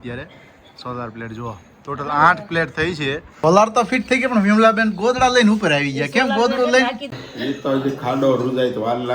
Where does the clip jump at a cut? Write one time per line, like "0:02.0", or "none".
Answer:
0:03.3
0:07.1